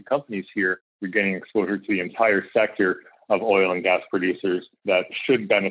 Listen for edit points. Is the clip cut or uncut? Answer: cut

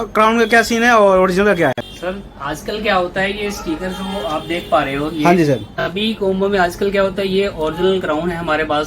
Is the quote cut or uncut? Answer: cut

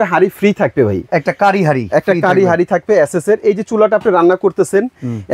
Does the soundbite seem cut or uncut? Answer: uncut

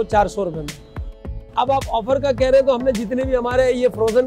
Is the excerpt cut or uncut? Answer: cut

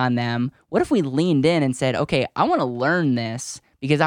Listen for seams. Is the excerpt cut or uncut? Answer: uncut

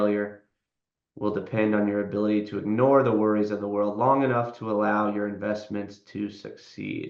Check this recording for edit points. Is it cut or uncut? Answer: uncut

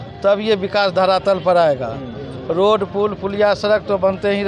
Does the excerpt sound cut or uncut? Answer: uncut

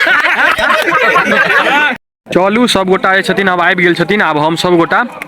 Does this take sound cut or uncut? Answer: cut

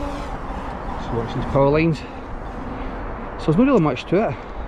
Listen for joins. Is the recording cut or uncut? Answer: uncut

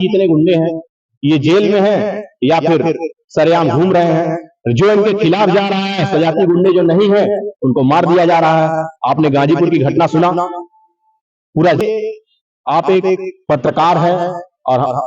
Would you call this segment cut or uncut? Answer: cut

